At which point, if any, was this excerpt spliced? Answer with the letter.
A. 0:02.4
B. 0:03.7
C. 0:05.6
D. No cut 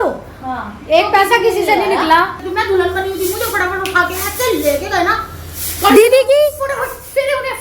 A